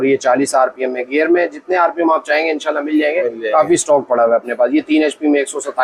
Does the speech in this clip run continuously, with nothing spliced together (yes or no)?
yes